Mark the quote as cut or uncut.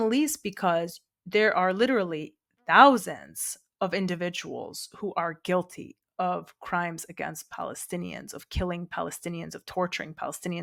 uncut